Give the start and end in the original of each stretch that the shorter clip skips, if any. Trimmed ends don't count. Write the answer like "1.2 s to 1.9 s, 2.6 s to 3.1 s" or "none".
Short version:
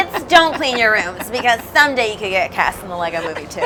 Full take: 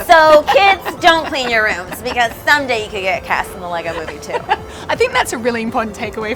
none